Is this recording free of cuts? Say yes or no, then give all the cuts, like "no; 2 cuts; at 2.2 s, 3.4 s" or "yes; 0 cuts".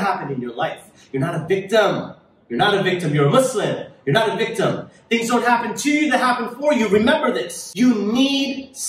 no; 1 cut; at 7.6 s